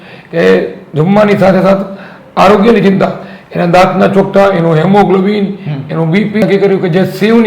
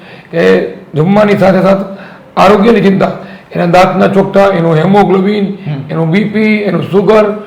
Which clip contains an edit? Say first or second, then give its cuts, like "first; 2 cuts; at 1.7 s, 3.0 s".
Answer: first; 1 cut; at 6.4 s